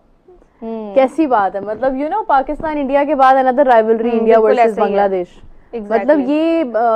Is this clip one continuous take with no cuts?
yes; 0 cuts

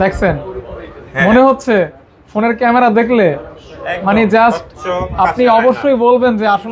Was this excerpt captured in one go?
yes; 0 cuts

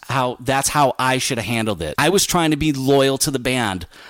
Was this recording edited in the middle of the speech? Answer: yes; 1 cut; at 1.9 s

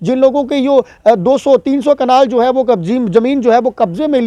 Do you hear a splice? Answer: no; 0 cuts

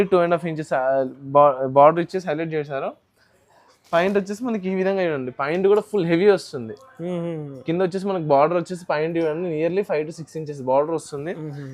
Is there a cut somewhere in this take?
no; 0 cuts

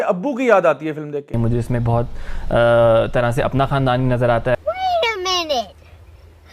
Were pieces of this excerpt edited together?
yes; 1 cut; at 1.3 s

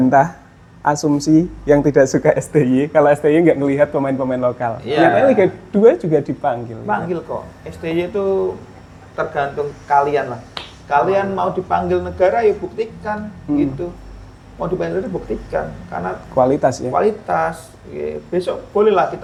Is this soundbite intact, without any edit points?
yes; 0 cuts

